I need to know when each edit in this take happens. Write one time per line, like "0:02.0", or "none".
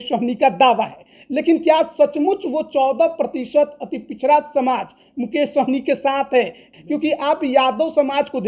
0:06.6